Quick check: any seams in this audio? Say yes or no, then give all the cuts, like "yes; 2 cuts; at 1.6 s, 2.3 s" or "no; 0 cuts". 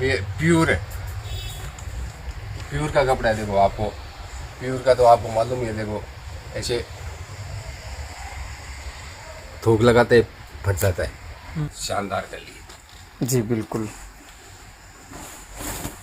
yes; 1 cut; at 11.6 s